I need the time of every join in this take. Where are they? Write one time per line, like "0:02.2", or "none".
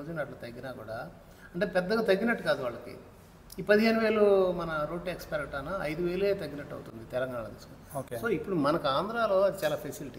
none